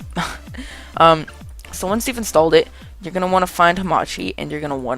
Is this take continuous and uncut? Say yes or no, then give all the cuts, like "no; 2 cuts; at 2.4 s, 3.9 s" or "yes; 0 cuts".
no; 1 cut; at 2.7 s